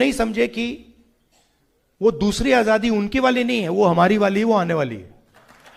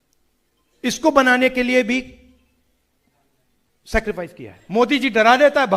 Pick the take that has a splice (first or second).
second